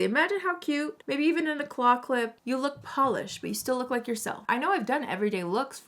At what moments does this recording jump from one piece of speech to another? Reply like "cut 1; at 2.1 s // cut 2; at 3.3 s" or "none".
cut 1; at 1.0 s // cut 2; at 2.4 s // cut 3; at 4.4 s

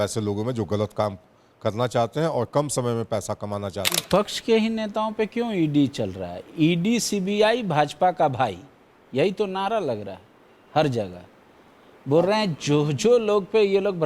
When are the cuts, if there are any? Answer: cut 1; at 3.9 s

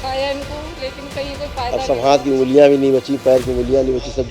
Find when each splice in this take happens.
none

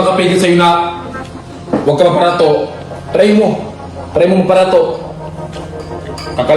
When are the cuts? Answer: none

